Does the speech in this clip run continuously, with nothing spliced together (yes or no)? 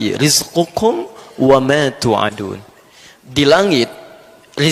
yes